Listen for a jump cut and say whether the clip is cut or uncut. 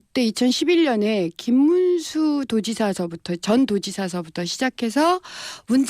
cut